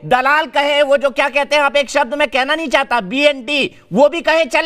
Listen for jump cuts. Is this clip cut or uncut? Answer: uncut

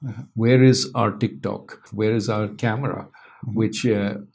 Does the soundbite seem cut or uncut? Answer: cut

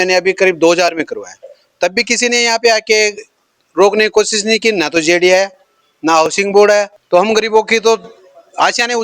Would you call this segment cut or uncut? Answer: cut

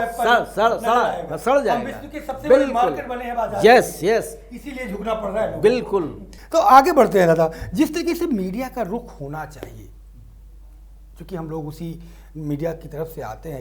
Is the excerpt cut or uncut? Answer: uncut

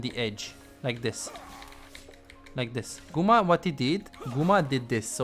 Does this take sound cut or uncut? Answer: cut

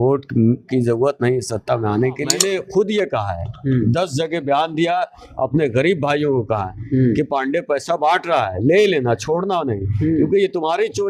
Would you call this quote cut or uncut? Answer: cut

